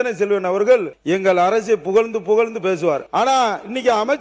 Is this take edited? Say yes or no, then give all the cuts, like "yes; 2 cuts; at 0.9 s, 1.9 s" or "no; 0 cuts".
yes; 2 cuts; at 0.9 s, 3.0 s